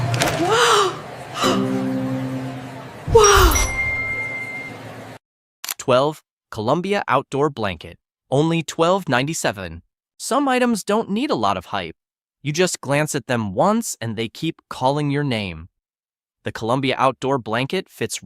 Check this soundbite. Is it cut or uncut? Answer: cut